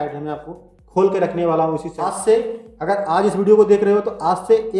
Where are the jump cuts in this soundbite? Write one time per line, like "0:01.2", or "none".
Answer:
0:01.9